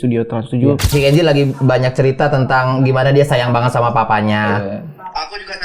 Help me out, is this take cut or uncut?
cut